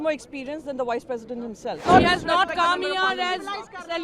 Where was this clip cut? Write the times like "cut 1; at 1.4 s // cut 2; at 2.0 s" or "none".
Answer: cut 1; at 1.8 s